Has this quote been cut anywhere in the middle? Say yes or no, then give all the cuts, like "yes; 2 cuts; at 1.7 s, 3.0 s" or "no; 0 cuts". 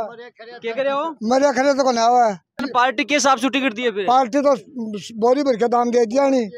yes; 1 cut; at 2.7 s